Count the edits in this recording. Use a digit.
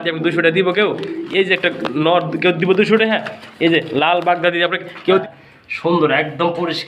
1